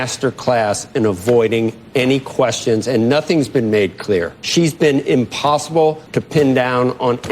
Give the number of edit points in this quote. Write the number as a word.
two